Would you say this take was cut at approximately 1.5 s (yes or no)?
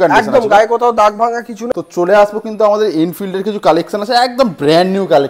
yes